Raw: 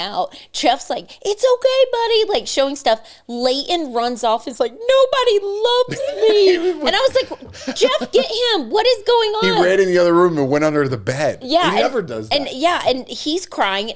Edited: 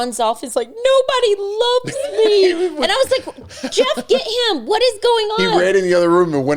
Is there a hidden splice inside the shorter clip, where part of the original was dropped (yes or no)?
no